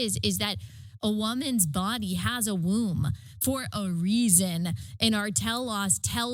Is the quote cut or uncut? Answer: uncut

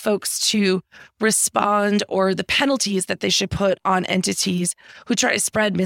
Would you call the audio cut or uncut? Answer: uncut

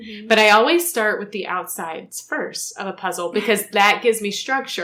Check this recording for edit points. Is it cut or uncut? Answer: uncut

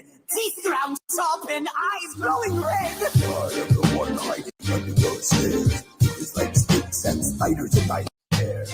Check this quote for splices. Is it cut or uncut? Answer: uncut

